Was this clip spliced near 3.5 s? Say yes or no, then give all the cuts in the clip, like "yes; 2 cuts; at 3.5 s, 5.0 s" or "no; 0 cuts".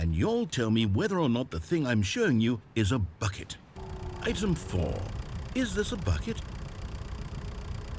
yes; 1 cut; at 3.5 s